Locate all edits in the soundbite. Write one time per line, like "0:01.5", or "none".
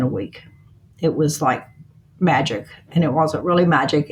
none